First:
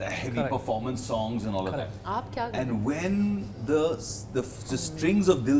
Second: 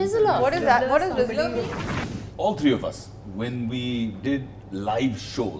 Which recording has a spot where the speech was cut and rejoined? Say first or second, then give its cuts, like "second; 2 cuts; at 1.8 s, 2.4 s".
second; 1 cut; at 1.8 s